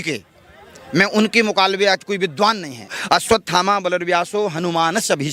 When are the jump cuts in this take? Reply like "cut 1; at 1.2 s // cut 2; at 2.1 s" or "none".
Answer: cut 1; at 2.9 s

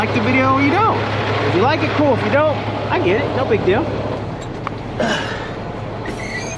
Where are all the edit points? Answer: none

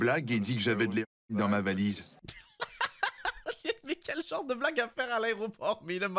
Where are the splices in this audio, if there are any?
none

